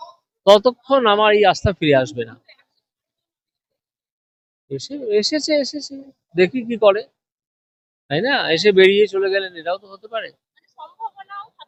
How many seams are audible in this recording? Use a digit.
0